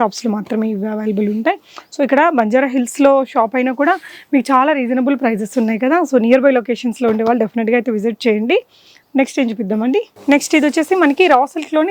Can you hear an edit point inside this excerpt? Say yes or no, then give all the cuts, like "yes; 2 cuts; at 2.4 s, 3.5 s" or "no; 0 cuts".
no; 0 cuts